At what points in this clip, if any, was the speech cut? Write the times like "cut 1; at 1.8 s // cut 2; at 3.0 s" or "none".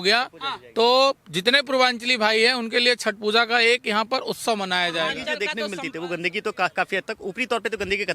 cut 1; at 5.3 s